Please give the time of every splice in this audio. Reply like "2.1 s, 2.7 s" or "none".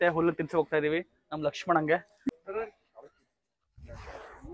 2.4 s